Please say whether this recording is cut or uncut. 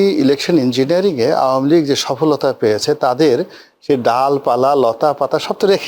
uncut